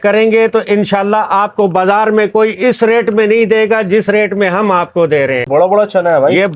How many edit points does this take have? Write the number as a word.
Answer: one